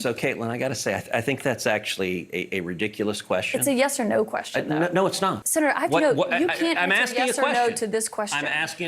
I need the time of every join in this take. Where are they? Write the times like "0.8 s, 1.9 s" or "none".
5.4 s